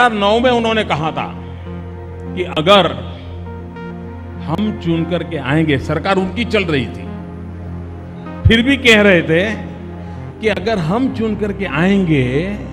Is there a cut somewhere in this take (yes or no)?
no